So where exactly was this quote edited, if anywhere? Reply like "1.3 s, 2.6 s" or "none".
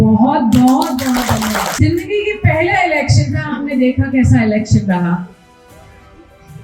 1.8 s